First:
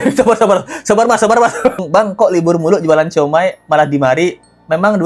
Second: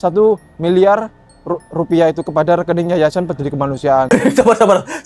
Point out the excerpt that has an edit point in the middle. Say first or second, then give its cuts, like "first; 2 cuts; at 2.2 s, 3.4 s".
first; 1 cut; at 1.8 s